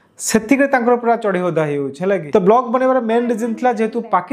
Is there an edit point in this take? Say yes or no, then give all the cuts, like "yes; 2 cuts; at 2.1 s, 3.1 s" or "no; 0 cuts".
yes; 1 cut; at 2.2 s